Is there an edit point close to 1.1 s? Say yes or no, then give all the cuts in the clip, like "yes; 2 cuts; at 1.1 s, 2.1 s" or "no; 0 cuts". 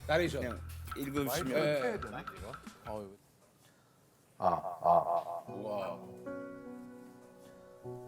no; 1 cut; at 3.1 s